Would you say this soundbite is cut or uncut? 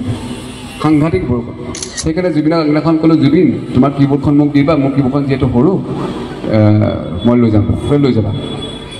cut